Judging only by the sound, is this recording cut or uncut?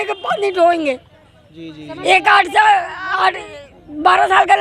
uncut